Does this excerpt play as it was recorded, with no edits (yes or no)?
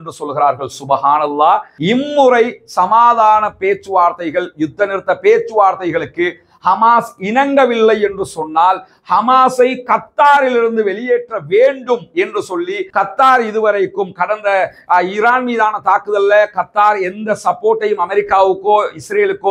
no